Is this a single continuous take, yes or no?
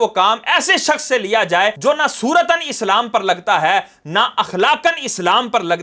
yes